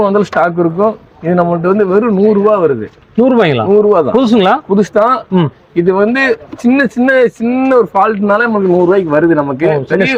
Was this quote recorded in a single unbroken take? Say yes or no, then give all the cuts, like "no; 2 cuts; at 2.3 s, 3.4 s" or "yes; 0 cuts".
yes; 0 cuts